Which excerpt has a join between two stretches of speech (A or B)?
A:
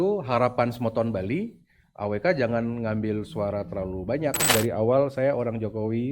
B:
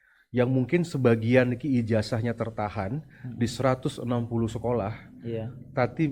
A